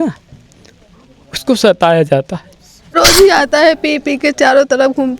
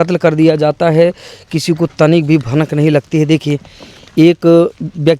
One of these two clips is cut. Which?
first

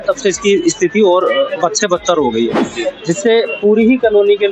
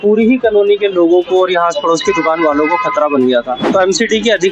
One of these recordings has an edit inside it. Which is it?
second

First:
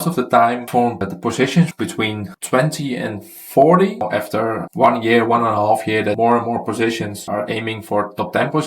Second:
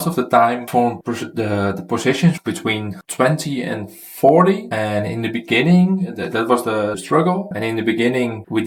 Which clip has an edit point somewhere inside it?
first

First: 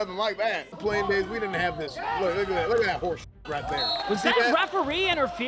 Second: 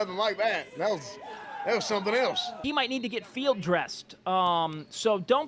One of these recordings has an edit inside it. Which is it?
first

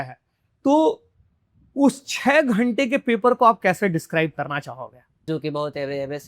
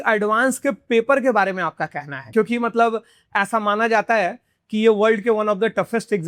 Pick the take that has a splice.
first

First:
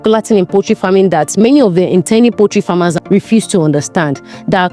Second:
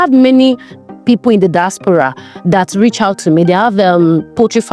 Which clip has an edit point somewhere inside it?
first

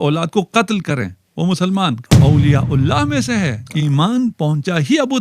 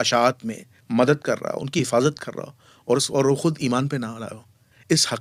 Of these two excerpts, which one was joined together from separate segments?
first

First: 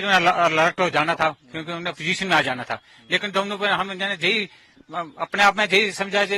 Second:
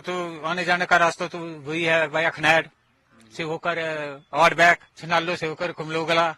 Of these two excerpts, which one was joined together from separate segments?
second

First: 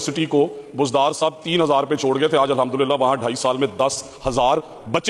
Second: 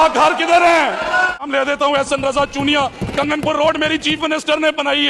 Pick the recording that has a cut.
second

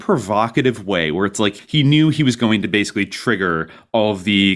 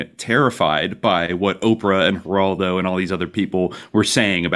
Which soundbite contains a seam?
first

